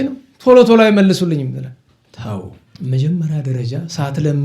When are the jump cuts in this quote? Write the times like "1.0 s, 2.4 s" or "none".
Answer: 2.6 s